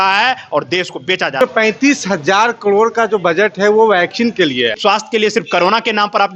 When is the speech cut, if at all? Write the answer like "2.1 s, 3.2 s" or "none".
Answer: 1.4 s, 4.8 s